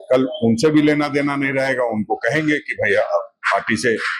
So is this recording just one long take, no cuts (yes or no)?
yes